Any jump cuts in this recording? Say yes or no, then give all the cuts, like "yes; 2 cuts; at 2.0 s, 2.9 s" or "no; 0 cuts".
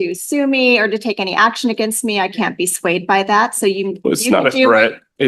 no; 0 cuts